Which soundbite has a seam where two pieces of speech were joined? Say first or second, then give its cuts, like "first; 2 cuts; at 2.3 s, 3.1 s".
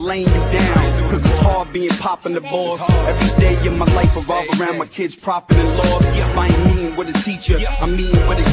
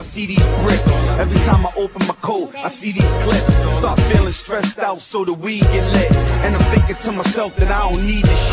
second; 1 cut; at 1.5 s